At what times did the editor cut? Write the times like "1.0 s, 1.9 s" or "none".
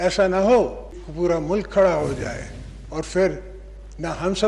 1.0 s